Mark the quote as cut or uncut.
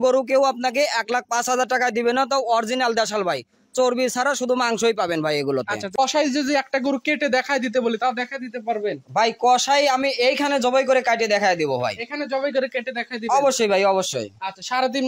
cut